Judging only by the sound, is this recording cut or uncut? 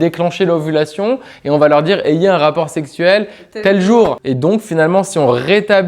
cut